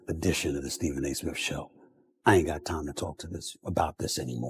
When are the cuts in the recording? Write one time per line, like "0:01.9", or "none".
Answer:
none